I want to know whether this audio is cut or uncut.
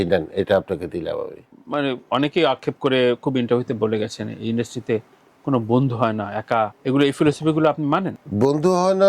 cut